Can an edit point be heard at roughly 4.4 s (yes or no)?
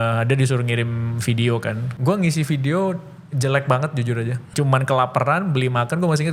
yes